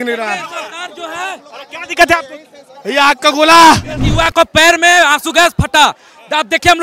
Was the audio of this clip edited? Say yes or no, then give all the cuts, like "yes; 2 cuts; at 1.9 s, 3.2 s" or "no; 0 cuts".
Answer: yes; 1 cut; at 4.1 s